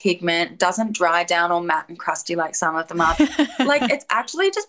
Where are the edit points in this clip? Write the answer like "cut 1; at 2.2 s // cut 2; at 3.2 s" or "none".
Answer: cut 1; at 3.7 s